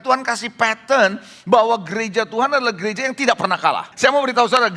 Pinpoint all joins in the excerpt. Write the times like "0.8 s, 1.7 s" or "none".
3.9 s